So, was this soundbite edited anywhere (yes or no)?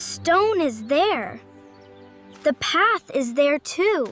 no